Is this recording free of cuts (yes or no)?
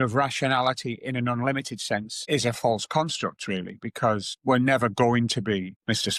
yes